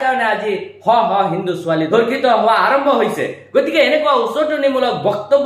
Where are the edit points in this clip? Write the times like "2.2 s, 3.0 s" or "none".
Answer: 1.9 s